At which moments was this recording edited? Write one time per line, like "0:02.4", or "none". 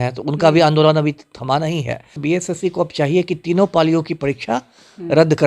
0:02.2